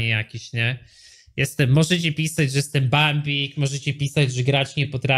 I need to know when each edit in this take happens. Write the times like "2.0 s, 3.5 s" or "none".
none